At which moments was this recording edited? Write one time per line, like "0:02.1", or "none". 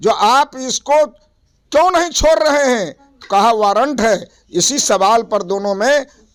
none